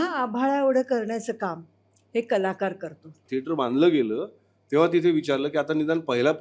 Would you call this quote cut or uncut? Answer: cut